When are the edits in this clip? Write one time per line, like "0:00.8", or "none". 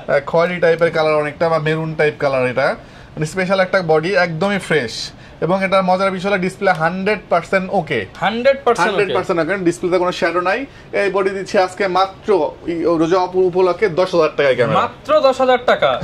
none